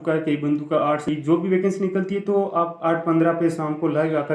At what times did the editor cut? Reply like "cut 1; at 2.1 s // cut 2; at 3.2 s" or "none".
cut 1; at 1.1 s